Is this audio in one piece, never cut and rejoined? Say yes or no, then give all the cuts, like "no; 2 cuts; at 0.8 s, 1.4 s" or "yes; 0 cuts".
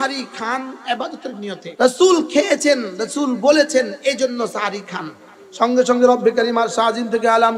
no; 1 cut; at 1.7 s